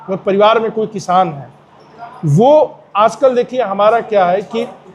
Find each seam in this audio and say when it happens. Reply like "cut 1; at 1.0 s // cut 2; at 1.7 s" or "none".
none